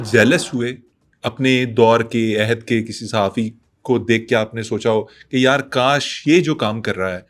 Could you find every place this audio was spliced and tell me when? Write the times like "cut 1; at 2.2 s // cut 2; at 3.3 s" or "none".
none